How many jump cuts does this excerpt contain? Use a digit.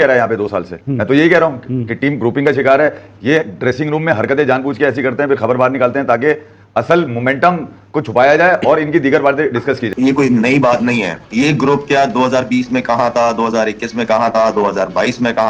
1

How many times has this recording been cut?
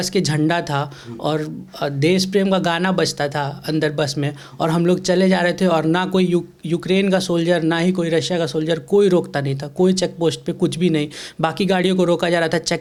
0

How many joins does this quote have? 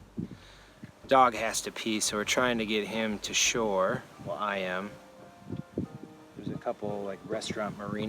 0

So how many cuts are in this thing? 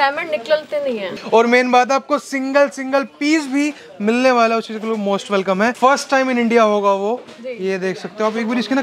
2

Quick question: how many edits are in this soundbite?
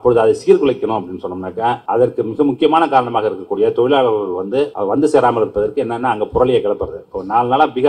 2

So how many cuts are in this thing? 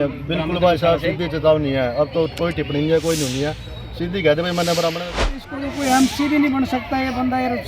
1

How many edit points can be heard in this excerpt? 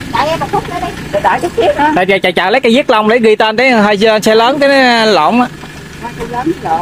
0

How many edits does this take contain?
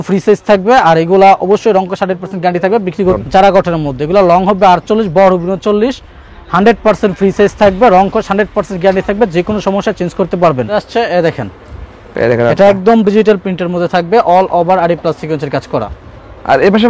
3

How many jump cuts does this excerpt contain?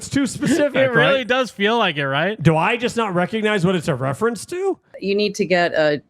1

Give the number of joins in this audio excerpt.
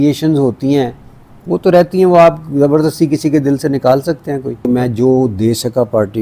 1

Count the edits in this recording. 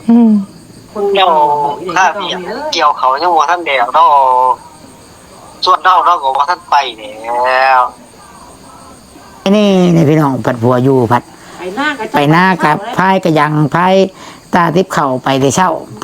2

